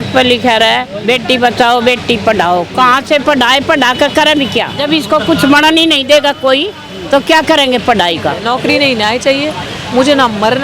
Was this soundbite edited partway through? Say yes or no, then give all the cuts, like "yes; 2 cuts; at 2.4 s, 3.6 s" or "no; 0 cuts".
yes; 2 cuts; at 4.7 s, 8.4 s